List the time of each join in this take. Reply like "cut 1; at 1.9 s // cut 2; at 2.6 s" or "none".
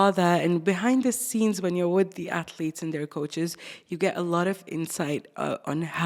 none

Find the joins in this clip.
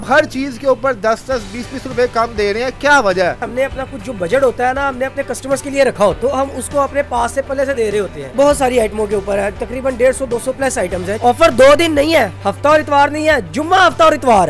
cut 1; at 3.5 s // cut 2; at 6.2 s // cut 3; at 8.3 s // cut 4; at 11.1 s

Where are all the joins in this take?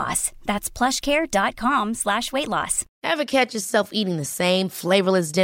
cut 1; at 2.8 s

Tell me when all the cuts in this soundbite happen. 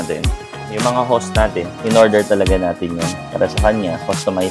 none

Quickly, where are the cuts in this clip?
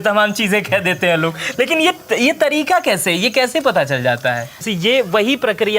cut 1; at 4.6 s

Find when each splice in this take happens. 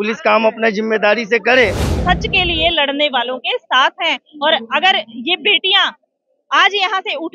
cut 1; at 1.9 s

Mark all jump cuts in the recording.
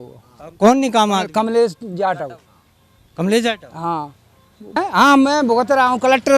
cut 1; at 4.7 s

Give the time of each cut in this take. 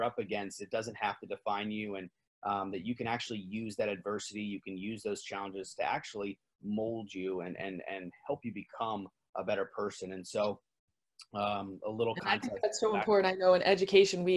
none

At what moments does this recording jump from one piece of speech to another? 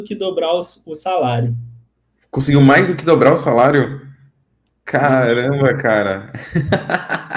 none

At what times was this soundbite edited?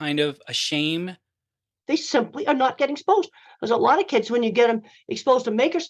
cut 1; at 1.3 s

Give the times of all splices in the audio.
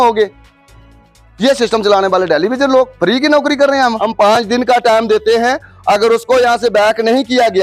cut 1; at 4.0 s

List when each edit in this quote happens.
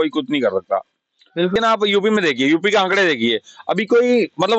cut 1; at 1.5 s

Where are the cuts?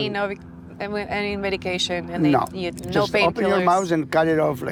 none

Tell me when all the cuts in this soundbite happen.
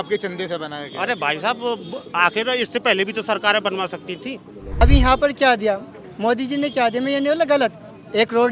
cut 1; at 4.8 s

